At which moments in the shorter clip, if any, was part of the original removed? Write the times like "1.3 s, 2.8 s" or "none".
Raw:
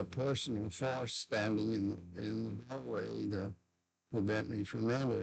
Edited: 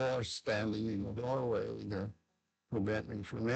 1.0 s